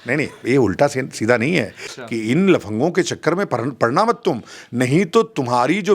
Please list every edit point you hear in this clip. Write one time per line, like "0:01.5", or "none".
0:01.9